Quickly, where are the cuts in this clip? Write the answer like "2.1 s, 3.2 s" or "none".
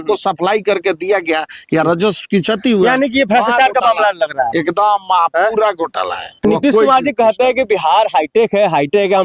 6.4 s